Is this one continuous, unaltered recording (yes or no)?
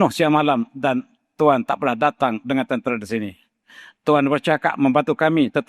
yes